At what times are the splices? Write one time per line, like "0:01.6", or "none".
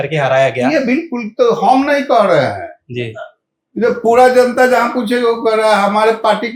none